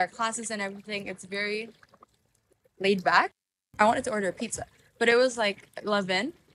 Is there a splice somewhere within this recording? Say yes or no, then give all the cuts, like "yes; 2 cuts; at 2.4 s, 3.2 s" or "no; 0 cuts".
yes; 1 cut; at 3.6 s